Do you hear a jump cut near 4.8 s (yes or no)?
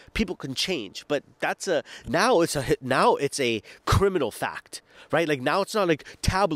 no